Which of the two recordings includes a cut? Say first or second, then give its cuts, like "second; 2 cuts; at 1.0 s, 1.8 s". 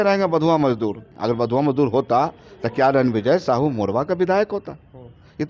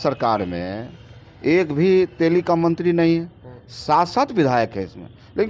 first; 1 cut; at 1.1 s